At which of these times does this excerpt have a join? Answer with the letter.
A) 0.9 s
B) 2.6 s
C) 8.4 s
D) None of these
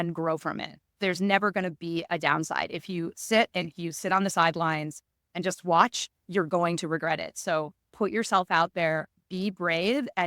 A